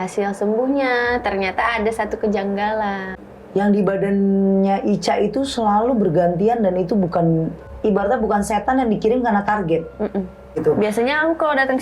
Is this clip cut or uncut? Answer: cut